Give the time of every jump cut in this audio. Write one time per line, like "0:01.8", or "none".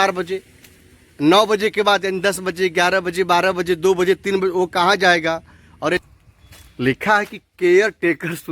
0:06.1